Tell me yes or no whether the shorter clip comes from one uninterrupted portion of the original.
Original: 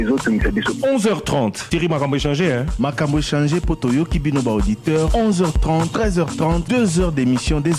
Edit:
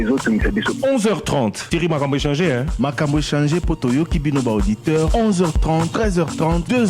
yes